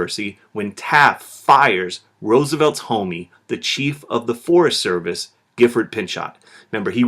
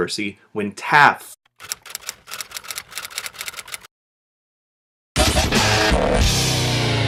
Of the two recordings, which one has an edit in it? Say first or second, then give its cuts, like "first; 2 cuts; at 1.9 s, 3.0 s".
first; 1 cut; at 1.3 s